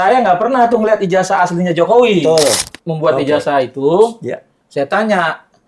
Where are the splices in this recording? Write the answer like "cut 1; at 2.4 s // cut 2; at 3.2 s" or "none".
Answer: cut 1; at 2.6 s

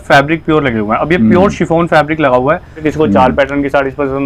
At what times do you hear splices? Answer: cut 1; at 2.8 s

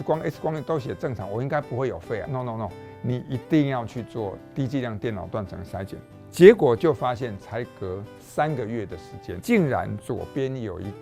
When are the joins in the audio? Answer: cut 1; at 2.3 s // cut 2; at 6.0 s

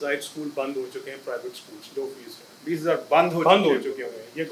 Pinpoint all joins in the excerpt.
none

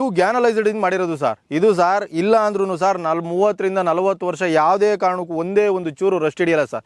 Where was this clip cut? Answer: none

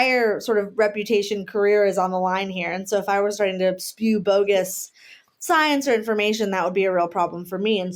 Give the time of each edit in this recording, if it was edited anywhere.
none

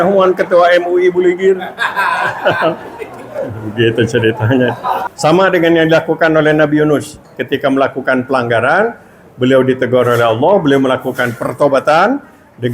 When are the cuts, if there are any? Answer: cut 1; at 5.1 s

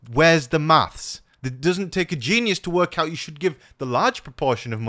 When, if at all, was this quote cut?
cut 1; at 1.3 s

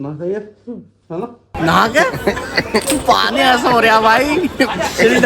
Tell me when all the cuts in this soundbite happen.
cut 1; at 1.4 s

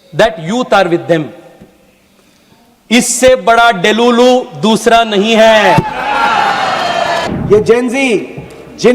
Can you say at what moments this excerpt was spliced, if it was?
cut 1; at 7.3 s

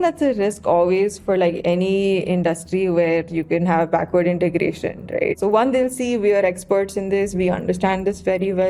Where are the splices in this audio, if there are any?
cut 1; at 5.3 s

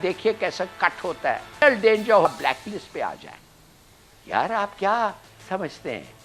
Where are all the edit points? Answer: cut 1; at 1.6 s

